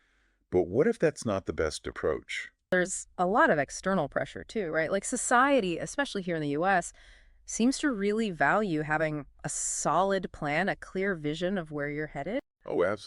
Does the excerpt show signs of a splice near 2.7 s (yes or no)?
yes